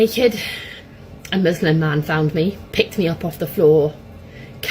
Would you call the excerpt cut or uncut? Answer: cut